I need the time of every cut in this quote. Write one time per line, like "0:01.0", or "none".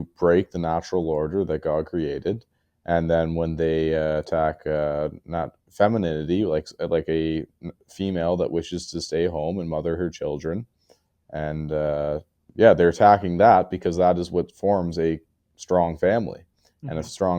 0:12.4